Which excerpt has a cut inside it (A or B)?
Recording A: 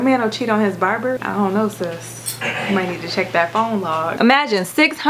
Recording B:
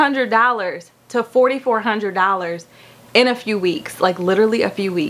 A